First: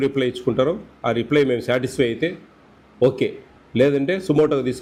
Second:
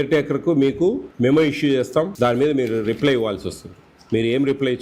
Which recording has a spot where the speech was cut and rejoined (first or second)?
second